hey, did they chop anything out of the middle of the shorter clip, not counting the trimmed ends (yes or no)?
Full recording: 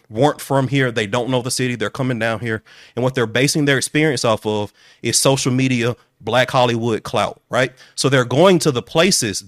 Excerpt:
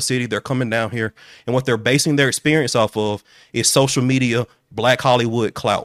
no